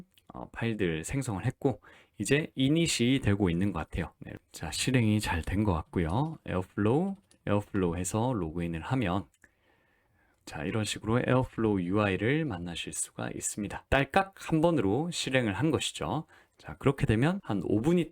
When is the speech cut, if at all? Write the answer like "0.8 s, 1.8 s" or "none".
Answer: 4.2 s, 13.8 s